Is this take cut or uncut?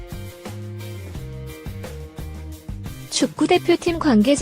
cut